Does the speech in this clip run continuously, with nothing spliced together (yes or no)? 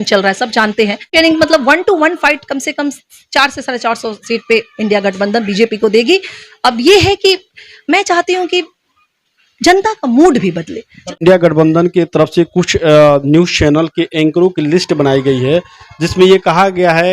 no